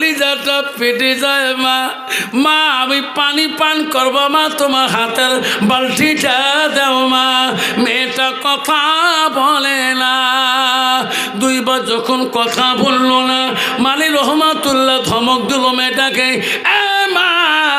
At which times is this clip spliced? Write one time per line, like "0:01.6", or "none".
none